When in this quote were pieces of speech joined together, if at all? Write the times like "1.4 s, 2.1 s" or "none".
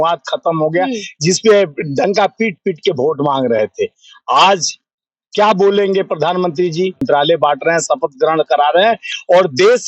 7.0 s